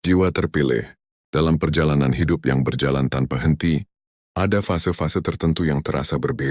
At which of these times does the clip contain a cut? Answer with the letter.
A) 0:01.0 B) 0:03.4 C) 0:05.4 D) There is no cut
A